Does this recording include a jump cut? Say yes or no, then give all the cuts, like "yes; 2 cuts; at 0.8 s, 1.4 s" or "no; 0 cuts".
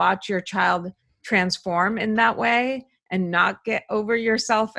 no; 0 cuts